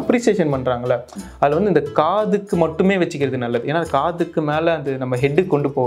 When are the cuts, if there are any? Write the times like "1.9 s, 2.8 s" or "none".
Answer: none